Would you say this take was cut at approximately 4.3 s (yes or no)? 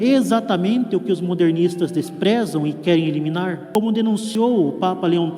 yes